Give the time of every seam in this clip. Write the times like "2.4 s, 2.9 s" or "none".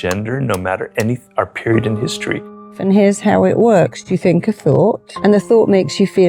2.8 s, 4.0 s, 5.1 s